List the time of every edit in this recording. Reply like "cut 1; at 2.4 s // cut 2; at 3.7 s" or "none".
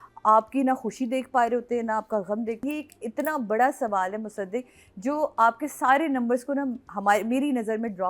cut 1; at 2.6 s

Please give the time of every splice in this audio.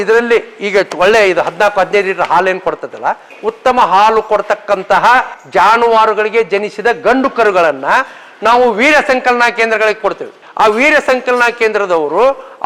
cut 1; at 3.3 s // cut 2; at 5.4 s

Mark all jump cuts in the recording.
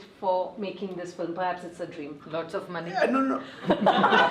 cut 1; at 2.2 s

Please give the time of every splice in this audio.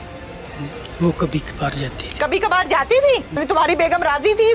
cut 1; at 3.4 s

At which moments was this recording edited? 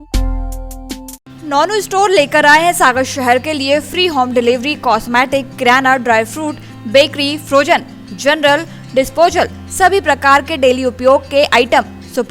none

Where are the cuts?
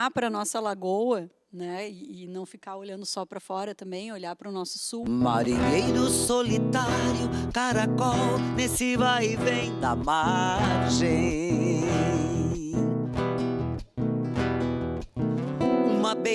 cut 1; at 5.0 s

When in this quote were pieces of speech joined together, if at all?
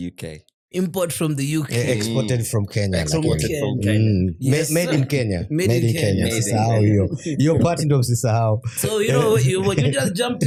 none

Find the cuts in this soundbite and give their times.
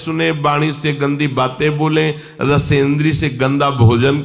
none

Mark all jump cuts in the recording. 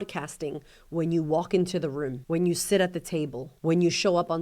cut 1; at 2.2 s // cut 2; at 3.5 s

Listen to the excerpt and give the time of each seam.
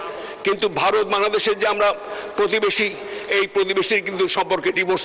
none

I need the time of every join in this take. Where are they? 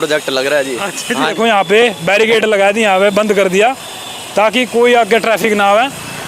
cut 1; at 1.4 s

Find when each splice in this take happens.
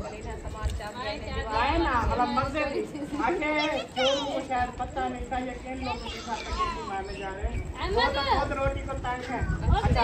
none

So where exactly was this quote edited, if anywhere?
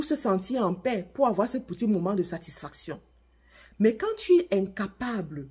none

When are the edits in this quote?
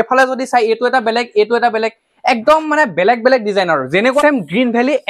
cut 1; at 4.2 s

